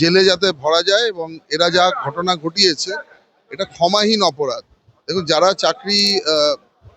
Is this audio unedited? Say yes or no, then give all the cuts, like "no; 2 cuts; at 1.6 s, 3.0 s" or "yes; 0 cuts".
yes; 0 cuts